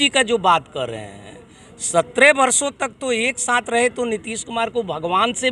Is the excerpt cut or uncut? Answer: uncut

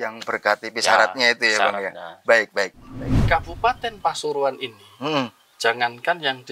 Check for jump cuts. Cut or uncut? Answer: cut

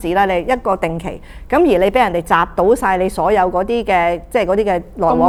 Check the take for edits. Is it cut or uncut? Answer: uncut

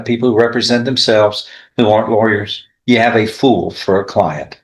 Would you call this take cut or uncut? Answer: uncut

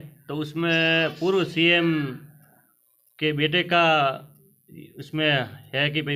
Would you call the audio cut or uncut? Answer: uncut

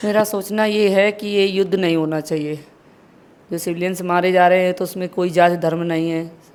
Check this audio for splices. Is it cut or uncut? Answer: uncut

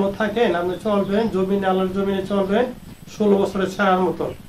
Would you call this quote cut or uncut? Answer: uncut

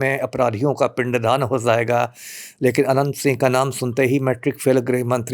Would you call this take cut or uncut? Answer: uncut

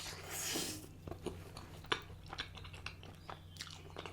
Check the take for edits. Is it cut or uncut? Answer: cut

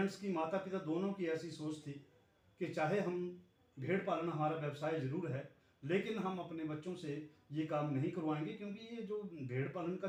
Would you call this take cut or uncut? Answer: uncut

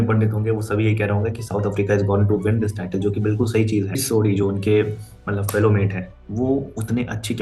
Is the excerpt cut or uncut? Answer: cut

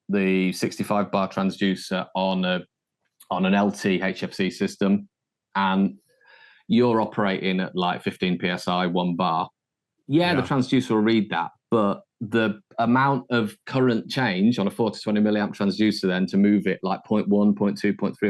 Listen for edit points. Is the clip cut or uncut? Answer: uncut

